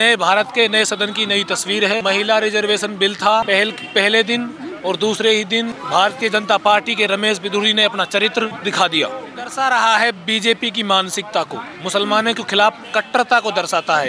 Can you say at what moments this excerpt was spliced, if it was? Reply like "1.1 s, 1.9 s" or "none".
2.0 s, 3.5 s, 5.8 s, 8.6 s, 9.5 s